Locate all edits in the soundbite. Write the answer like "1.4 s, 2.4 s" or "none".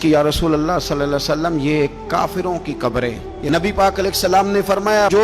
3.3 s

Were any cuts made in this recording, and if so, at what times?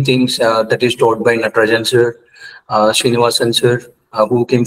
none

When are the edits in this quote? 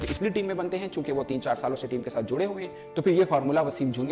none

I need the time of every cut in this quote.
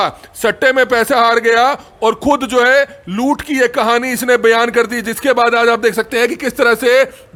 none

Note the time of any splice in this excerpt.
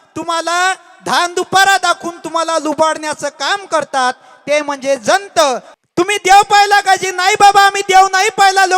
5.7 s

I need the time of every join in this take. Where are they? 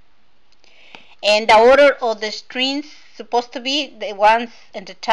none

